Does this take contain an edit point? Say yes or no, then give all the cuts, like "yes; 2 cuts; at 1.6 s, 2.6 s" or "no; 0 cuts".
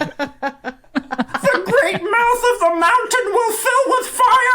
yes; 1 cut; at 1.4 s